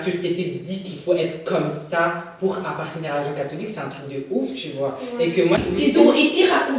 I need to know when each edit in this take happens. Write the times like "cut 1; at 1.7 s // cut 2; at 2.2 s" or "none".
cut 1; at 5.6 s